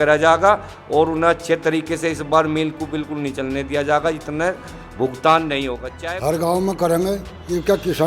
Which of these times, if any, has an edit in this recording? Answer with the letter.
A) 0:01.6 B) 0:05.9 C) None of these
B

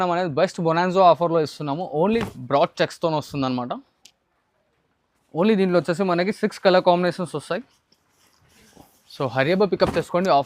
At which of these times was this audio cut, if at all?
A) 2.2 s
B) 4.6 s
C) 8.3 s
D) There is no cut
A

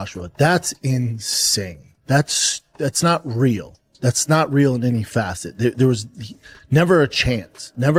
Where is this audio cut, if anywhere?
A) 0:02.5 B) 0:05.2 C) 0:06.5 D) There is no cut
D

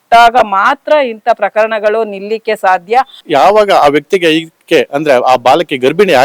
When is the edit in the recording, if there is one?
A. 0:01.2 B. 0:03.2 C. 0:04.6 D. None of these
B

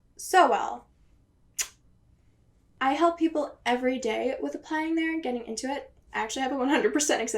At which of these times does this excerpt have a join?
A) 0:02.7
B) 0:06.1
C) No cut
A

